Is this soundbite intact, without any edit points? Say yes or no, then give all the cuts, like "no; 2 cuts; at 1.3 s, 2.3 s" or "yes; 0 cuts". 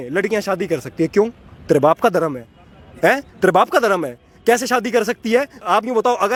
yes; 0 cuts